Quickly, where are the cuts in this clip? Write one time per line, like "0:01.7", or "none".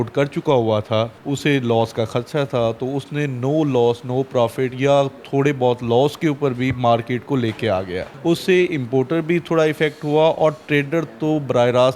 0:01.2
0:08.0

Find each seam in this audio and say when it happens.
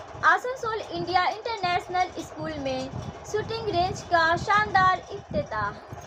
none

